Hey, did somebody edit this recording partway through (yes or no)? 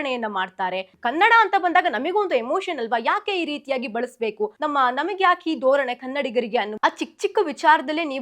yes